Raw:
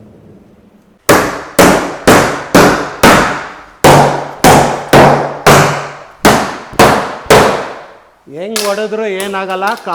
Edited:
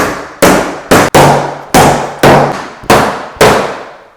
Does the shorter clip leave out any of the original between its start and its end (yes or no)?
yes